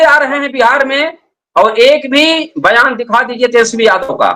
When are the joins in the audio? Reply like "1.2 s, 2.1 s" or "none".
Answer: none